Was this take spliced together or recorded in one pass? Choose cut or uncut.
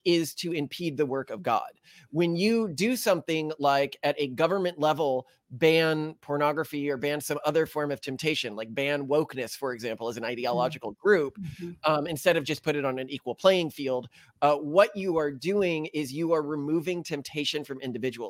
uncut